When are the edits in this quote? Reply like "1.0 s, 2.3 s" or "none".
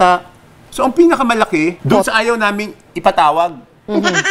1.8 s